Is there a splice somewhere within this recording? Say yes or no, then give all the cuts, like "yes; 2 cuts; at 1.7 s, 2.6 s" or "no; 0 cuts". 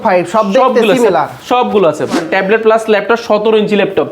yes; 1 cut; at 2.1 s